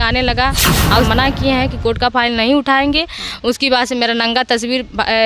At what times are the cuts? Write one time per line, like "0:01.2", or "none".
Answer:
0:00.9